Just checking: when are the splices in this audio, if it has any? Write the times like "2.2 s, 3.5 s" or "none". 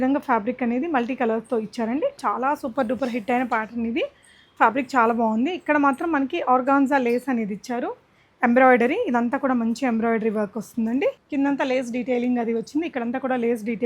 2.2 s, 11.2 s